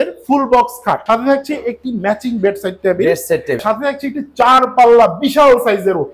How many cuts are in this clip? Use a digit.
2